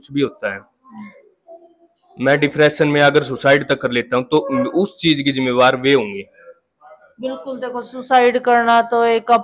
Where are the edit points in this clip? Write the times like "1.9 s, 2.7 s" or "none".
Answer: none